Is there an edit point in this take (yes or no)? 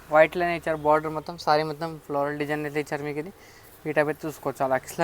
no